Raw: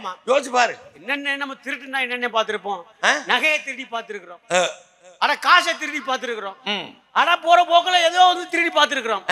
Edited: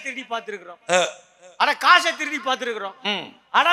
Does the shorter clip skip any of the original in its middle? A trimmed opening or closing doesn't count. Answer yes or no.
no